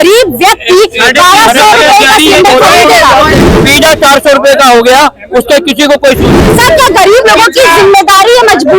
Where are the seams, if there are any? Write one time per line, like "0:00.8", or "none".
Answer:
0:03.3
0:06.3